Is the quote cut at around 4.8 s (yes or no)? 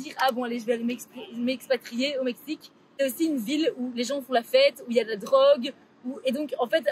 no